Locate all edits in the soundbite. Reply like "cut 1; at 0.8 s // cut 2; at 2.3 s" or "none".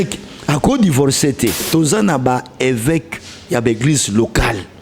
cut 1; at 1.6 s

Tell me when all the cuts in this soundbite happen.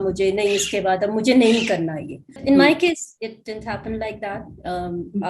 cut 1; at 2.4 s

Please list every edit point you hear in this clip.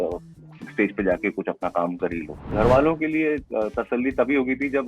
cut 1; at 2.5 s

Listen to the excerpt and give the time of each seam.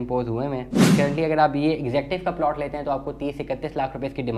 cut 1; at 0.9 s

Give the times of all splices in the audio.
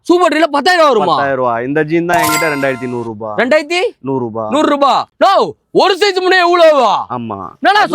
cut 1; at 5.1 s

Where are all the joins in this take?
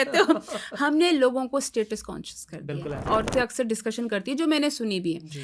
cut 1; at 3.0 s

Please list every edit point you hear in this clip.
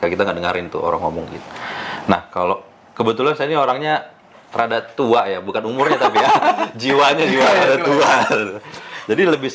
none

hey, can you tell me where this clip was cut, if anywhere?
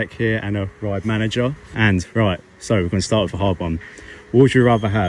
cut 1; at 1.6 s

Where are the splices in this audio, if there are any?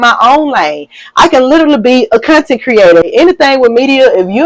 cut 1; at 3.1 s

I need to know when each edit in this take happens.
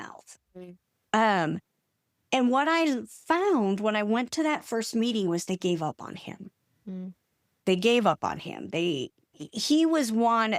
none

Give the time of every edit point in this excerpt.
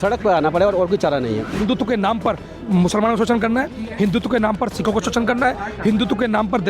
cut 1; at 1.5 s

